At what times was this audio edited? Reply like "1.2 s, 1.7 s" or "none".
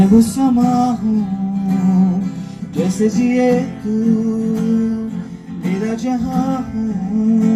none